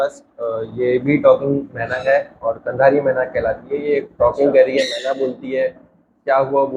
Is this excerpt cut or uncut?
uncut